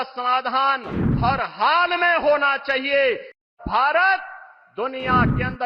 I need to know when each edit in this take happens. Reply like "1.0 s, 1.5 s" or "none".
3.5 s